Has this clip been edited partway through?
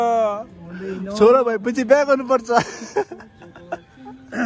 no; 0 cuts

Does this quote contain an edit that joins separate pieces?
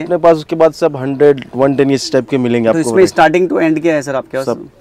no; 0 cuts

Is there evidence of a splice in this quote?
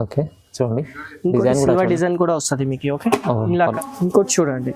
yes; 1 cut; at 3.7 s

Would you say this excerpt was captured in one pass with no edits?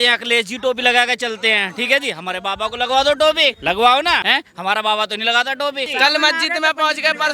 no; 3 cuts; at 3.6 s, 4.2 s, 5.9 s

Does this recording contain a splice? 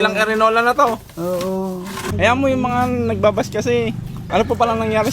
yes; 2 cuts; at 2.0 s, 4.1 s

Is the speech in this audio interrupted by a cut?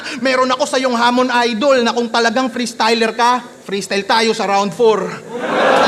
no; 0 cuts

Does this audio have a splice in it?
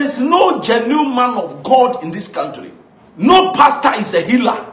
no; 0 cuts

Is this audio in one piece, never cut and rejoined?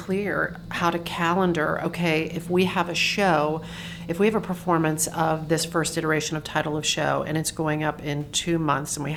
yes; 0 cuts

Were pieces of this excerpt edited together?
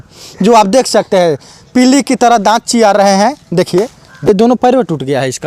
yes; 1 cut; at 4.3 s

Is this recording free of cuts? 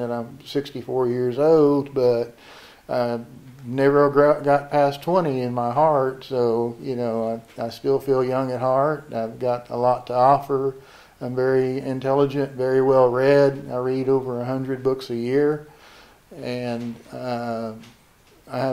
yes; 0 cuts

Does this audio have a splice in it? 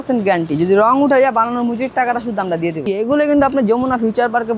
yes; 1 cut; at 2.9 s

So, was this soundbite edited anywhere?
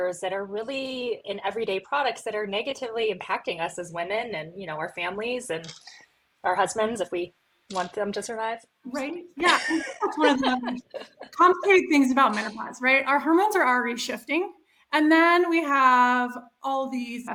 no; 0 cuts

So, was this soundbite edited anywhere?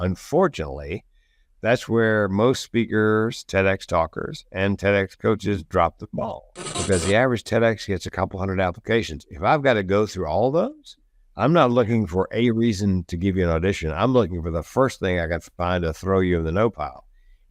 yes; 1 cut; at 6.8 s

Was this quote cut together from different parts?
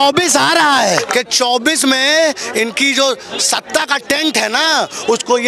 yes; 1 cut; at 1.1 s

